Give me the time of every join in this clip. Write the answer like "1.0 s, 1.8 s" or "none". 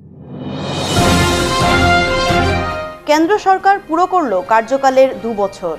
none